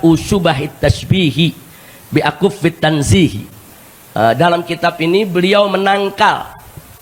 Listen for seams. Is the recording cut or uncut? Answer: uncut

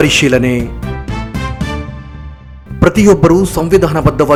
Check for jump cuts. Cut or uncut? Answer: uncut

